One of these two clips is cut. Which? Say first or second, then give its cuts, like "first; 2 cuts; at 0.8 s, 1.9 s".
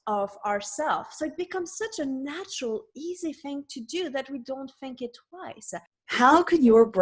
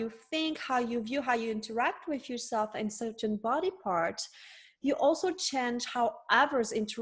first; 1 cut; at 6.0 s